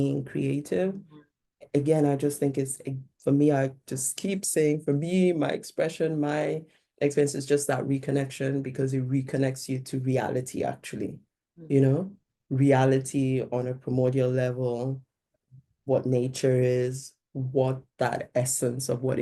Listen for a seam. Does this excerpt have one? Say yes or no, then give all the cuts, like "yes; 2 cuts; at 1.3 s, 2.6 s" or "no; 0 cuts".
no; 0 cuts